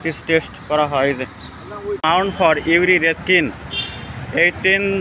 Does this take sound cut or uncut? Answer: cut